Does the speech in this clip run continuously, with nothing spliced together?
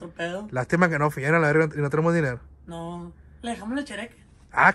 yes; 0 cuts

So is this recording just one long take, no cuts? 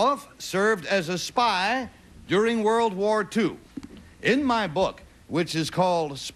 no; 1 cut; at 3.9 s

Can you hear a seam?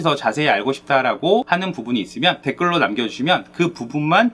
yes; 1 cut; at 1.9 s

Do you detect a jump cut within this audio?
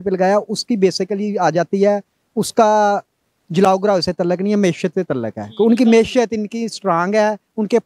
no; 0 cuts

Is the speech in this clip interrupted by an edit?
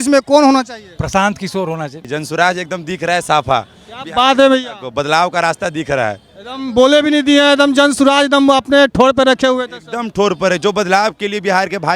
yes; 1 cut; at 2.1 s

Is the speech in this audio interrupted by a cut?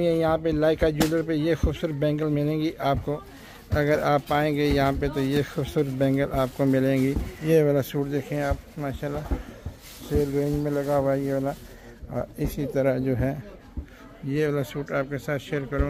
yes; 1 cut; at 7.3 s

